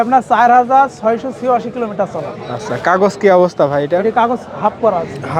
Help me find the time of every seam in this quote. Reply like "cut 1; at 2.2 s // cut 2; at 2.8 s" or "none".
none